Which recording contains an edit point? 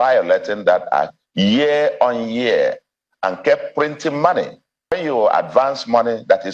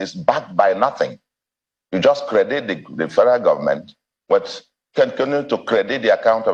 first; 1 cut; at 4.9 s

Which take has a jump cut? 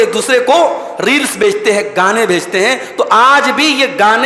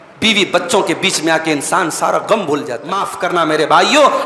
second; 1 cut; at 3.1 s

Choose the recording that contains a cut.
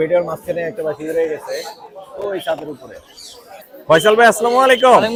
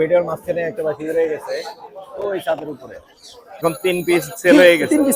second; 1 cut; at 3.6 s

